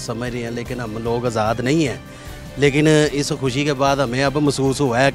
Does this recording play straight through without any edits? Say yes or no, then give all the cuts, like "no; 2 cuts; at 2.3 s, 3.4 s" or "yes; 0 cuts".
yes; 0 cuts